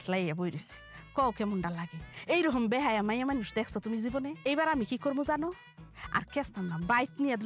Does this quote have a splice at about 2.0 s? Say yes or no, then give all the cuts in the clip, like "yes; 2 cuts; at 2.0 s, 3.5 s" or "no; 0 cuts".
no; 1 cut; at 4.4 s